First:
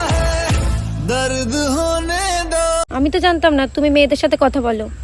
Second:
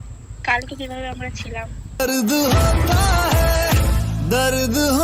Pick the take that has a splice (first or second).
first